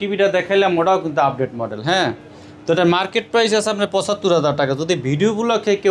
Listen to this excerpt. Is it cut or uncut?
uncut